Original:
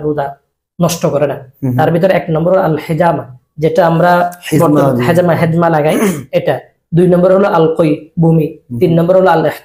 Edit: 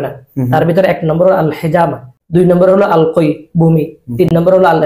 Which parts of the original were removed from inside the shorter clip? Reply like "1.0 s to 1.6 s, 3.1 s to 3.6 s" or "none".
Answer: 3.4 s to 6.7 s